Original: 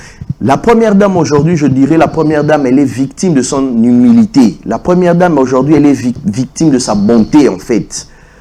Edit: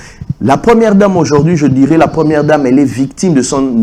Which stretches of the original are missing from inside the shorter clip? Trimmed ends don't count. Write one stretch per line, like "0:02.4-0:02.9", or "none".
none